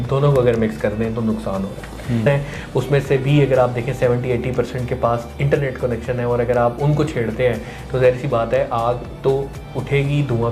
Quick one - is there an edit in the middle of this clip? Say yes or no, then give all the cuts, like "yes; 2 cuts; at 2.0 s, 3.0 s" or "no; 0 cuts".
yes; 1 cut; at 2.3 s